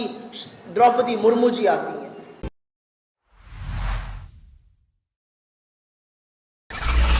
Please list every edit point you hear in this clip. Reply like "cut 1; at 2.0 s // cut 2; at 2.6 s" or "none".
none